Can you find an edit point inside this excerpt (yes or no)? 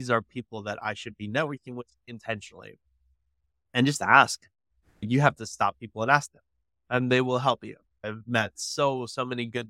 yes